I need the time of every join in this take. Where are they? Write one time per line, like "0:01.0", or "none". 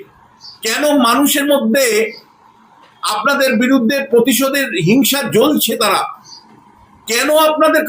none